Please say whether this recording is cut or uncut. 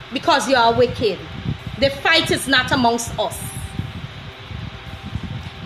uncut